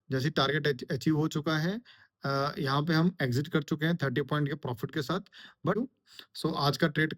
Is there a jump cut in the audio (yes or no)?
yes